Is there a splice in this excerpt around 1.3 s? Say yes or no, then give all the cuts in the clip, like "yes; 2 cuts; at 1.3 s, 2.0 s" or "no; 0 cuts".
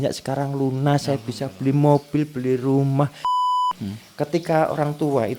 no; 1 cut; at 3.5 s